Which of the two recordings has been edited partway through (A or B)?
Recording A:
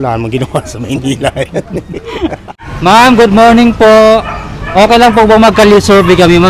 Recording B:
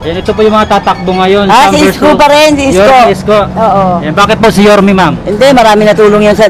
A